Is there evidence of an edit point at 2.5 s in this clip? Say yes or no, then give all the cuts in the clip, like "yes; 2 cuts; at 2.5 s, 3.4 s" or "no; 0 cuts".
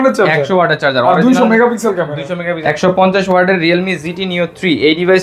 yes; 1 cut; at 2.5 s